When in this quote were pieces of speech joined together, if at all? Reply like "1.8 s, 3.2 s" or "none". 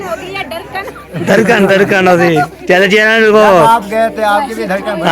none